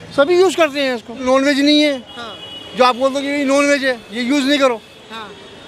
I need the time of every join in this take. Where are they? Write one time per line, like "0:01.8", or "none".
0:01.2